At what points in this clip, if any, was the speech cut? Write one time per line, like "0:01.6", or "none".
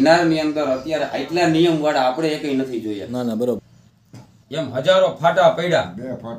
0:03.6